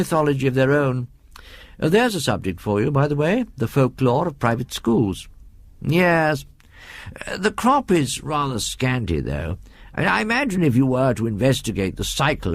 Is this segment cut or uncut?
cut